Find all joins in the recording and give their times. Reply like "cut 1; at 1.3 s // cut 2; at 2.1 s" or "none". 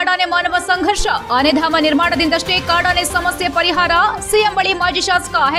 none